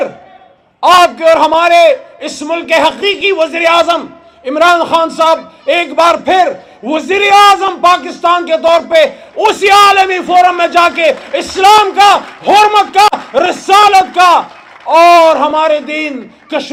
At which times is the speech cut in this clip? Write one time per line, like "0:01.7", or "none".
none